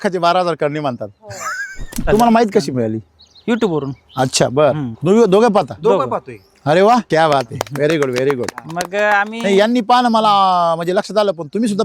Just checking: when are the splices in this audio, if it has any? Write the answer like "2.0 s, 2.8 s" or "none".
2.1 s, 7.1 s